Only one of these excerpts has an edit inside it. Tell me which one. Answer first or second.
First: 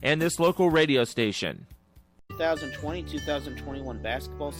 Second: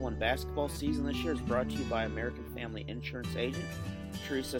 first